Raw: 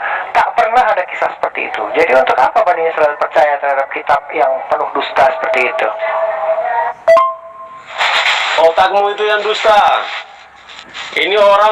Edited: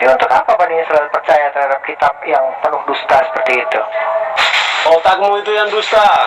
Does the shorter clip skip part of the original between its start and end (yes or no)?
yes